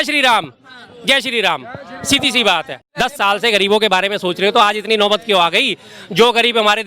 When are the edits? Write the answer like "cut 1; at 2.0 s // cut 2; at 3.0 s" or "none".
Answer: cut 1; at 3.0 s